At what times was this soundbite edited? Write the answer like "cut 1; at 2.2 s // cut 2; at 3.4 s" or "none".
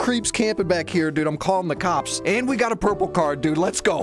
cut 1; at 2.1 s